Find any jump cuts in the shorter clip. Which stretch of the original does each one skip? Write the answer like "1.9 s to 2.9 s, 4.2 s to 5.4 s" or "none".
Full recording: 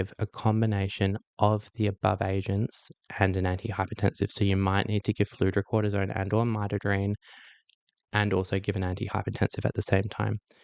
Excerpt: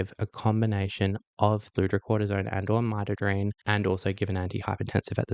1.7 s to 5.3 s, 7.2 s to 8.1 s